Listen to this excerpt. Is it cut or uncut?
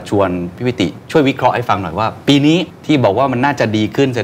cut